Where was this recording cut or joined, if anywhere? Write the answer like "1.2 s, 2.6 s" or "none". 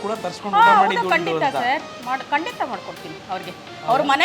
none

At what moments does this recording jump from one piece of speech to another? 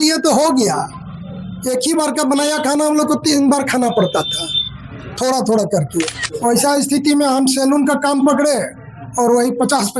6.2 s

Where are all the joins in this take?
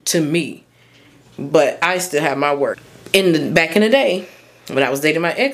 2.9 s

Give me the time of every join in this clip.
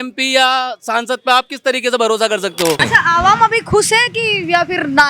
2.8 s

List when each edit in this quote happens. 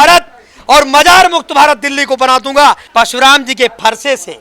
2.8 s

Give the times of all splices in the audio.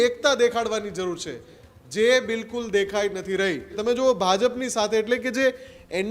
3.8 s

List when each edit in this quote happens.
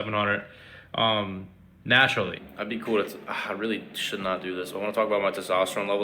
2.3 s

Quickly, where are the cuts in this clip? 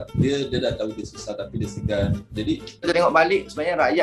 2.8 s

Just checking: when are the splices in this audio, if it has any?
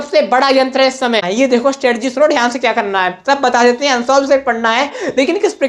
1.3 s

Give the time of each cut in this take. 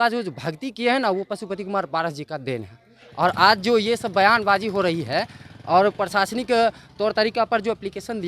none

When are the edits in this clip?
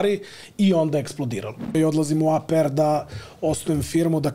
1.7 s

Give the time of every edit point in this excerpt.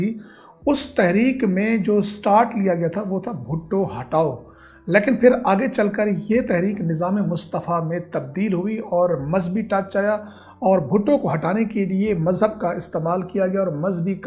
none

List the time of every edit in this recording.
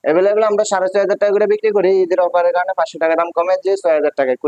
none

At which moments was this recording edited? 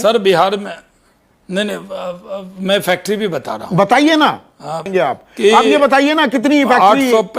4.9 s

